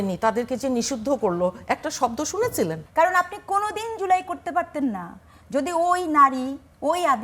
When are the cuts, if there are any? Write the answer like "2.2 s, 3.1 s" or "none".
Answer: 2.8 s